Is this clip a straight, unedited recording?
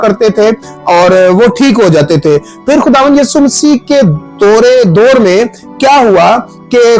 yes; 0 cuts

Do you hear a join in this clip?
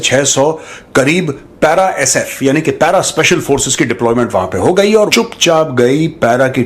yes; 1 cut; at 5.1 s

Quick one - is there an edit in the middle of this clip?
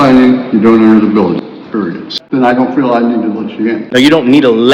yes; 1 cut; at 2.0 s

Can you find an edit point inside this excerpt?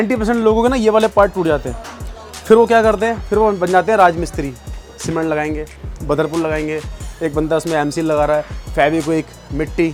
no; 0 cuts

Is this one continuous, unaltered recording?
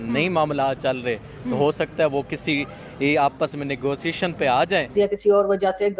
no; 1 cut; at 4.9 s

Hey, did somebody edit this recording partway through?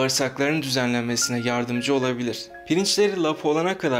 yes; 1 cut; at 2.5 s

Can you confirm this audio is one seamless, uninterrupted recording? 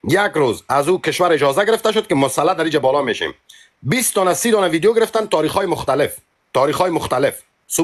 yes; 0 cuts

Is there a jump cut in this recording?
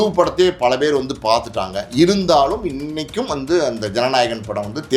no; 0 cuts

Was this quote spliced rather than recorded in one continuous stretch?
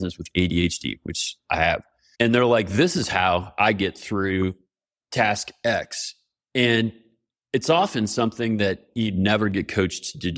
no; 0 cuts

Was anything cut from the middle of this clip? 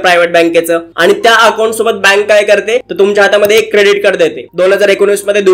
yes; 2 cuts; at 2.9 s, 4.5 s

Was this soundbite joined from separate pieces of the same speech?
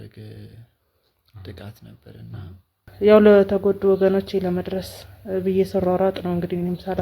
yes; 1 cut; at 2.9 s

